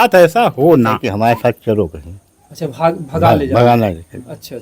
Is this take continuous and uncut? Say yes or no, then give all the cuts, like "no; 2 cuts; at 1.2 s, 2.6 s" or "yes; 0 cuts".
no; 1 cut; at 1.1 s